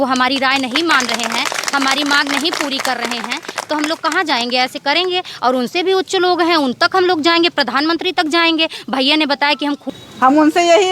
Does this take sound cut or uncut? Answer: cut